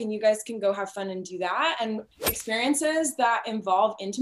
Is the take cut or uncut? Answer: cut